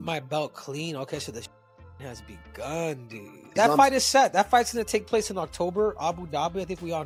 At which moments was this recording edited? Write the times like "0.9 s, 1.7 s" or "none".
none